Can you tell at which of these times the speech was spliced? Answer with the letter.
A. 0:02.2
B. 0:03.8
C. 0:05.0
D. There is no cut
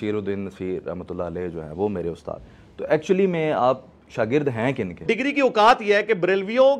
C